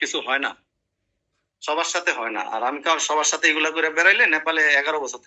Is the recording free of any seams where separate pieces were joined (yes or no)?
yes